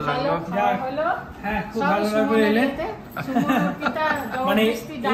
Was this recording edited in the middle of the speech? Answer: no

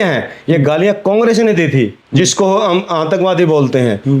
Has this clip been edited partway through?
yes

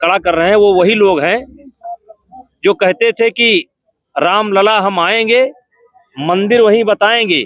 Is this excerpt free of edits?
yes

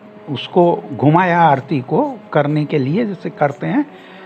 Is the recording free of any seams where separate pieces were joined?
yes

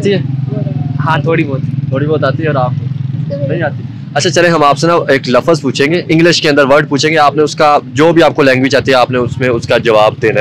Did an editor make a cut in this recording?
no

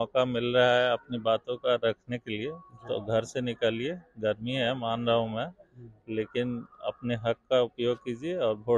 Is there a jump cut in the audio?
no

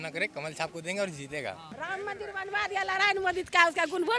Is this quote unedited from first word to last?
no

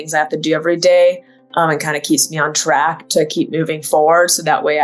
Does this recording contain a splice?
no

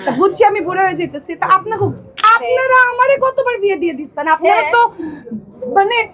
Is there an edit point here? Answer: yes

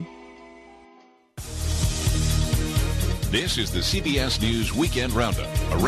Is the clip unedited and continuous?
no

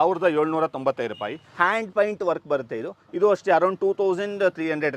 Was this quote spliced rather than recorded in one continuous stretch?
yes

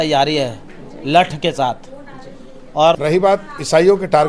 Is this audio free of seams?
no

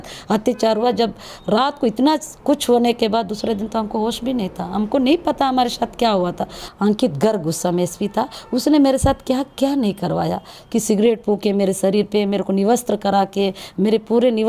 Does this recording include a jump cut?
yes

